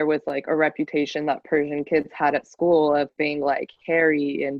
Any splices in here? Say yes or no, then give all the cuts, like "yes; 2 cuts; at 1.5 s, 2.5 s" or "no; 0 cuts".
yes; 1 cut; at 3.1 s